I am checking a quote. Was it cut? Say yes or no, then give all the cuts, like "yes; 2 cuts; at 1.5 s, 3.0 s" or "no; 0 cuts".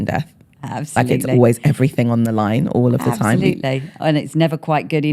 no; 0 cuts